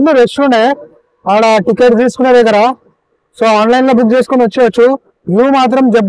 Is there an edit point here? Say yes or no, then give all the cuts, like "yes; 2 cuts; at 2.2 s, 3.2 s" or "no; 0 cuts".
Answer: no; 0 cuts